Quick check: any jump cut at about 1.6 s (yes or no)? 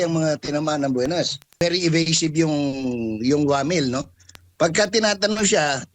yes